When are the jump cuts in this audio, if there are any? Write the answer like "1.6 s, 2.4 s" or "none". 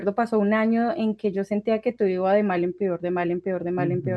none